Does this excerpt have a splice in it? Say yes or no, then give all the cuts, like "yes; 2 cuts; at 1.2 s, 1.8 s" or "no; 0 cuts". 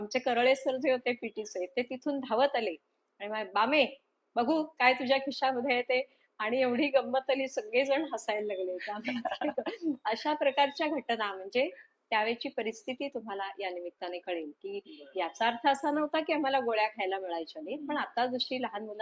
no; 0 cuts